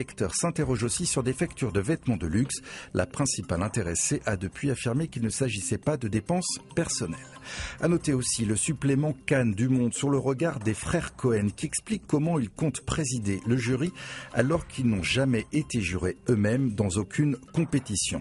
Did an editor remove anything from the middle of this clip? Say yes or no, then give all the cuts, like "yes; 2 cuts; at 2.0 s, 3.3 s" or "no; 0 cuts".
no; 0 cuts